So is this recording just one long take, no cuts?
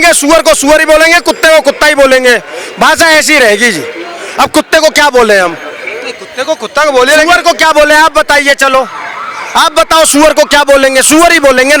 yes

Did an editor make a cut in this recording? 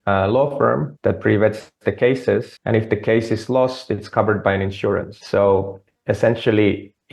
yes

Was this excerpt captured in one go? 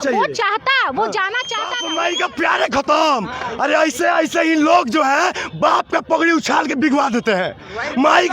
no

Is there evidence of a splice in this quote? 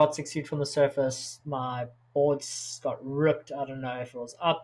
no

